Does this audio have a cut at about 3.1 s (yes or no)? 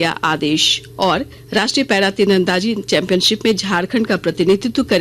no